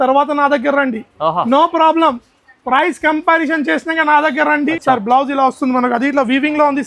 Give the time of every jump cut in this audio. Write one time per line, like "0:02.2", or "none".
0:04.7